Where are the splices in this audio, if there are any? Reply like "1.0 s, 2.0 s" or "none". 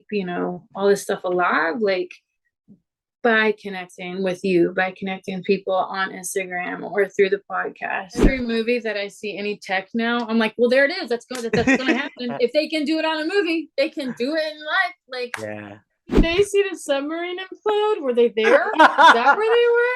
8.3 s, 16.2 s